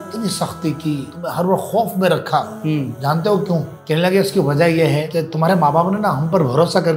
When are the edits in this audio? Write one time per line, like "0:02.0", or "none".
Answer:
0:01.1
0:02.9
0:03.7
0:05.1